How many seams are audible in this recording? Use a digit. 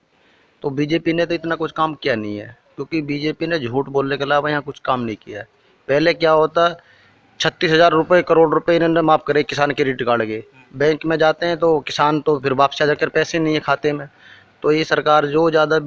0